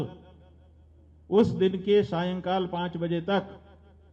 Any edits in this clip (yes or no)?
no